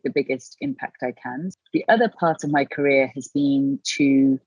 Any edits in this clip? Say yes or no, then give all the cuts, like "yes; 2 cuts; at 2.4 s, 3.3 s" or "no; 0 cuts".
yes; 1 cut; at 1.6 s